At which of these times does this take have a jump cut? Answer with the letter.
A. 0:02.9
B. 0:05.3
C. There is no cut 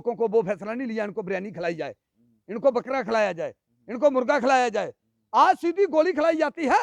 C